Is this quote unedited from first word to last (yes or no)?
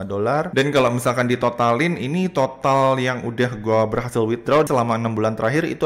no